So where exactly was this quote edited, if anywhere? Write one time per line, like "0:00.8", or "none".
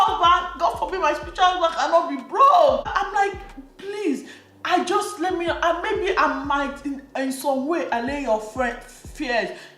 none